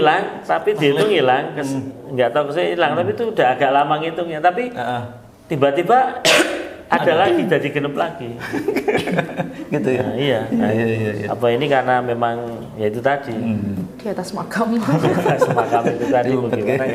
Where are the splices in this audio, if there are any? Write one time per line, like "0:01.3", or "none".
none